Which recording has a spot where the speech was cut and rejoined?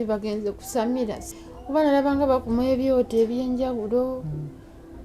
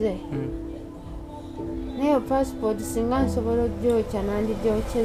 first; 1 cut; at 1.2 s

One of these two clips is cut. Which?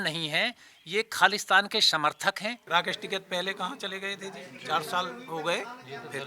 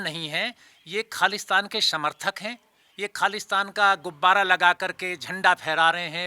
first; 1 cut; at 2.6 s

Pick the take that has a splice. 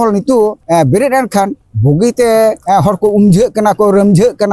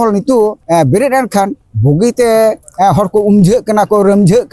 first; 1 cut; at 2.6 s

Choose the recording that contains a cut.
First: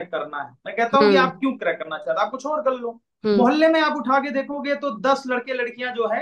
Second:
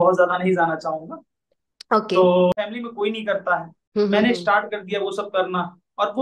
second; 1 cut; at 2.5 s

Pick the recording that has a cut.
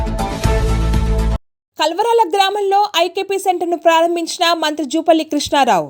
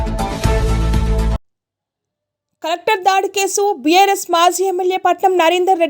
first; 1 cut; at 1.3 s

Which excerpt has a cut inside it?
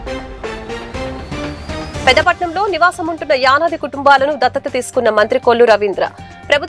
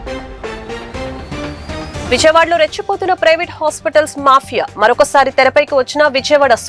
first; 1 cut; at 1.4 s

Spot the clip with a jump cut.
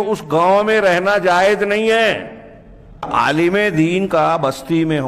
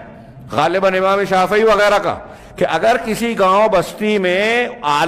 first; 1 cut; at 3.1 s

